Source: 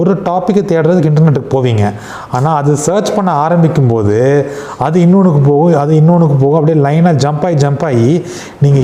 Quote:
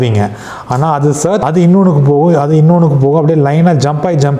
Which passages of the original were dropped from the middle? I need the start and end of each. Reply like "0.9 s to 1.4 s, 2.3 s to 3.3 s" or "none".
3.0 s to 4.8 s